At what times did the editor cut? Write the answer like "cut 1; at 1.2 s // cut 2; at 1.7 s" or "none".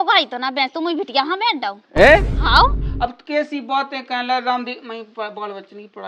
cut 1; at 2.7 s